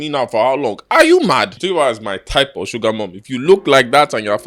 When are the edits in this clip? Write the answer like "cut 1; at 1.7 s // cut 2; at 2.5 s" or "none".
cut 1; at 1.5 s